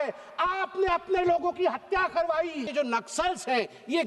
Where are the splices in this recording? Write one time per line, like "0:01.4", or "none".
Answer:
0:02.7